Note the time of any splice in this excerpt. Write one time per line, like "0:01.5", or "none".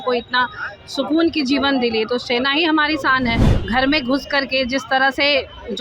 0:03.5